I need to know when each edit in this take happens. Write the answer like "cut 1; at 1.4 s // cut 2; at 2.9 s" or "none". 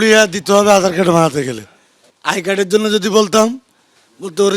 cut 1; at 1.9 s